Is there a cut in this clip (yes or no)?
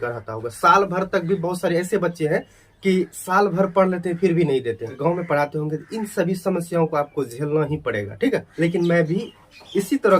yes